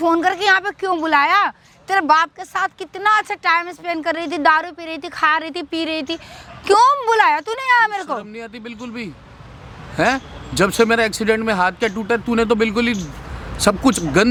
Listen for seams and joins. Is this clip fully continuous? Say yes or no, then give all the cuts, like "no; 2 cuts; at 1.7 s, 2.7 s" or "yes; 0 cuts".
yes; 0 cuts